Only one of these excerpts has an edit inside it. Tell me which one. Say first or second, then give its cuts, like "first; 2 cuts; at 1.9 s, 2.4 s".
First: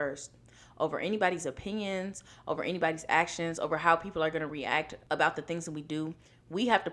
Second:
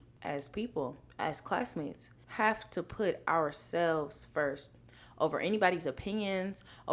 first; 1 cut; at 5.0 s